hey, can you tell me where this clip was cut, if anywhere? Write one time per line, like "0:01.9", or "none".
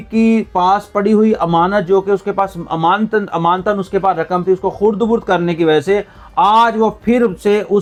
none